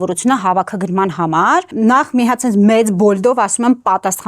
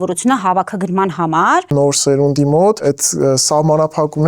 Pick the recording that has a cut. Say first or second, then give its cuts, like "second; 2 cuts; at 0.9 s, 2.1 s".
second; 2 cuts; at 1.7 s, 2.8 s